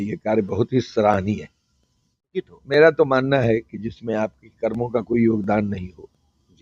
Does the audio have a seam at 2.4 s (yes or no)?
yes